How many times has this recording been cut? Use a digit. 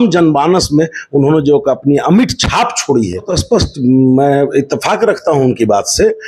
1